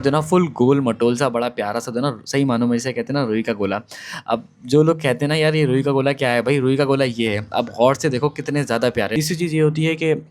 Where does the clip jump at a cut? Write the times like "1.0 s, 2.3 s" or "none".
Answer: 9.1 s